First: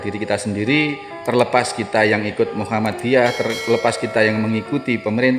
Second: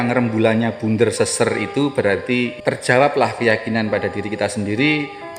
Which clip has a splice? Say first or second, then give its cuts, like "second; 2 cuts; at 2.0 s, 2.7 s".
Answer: second; 1 cut; at 2.5 s